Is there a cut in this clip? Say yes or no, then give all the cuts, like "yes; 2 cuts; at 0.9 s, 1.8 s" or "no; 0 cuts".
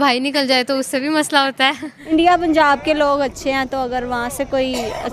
yes; 1 cut; at 1.9 s